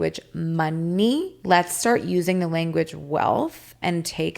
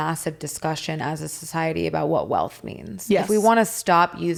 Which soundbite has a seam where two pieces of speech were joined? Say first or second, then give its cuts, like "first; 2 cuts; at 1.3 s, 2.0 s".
first; 1 cut; at 1.3 s